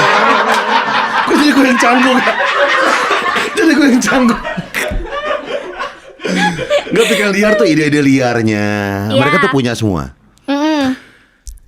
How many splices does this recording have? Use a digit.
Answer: 0